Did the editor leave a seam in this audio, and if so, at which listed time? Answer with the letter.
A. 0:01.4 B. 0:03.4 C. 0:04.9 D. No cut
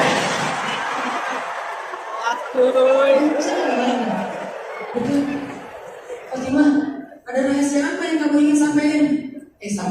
C